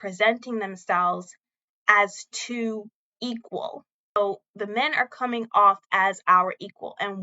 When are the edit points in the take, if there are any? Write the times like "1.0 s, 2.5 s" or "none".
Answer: 4.2 s